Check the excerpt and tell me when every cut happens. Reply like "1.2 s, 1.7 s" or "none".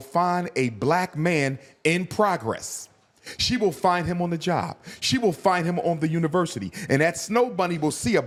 none